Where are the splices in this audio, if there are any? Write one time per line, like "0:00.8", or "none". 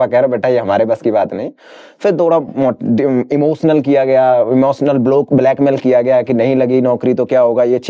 none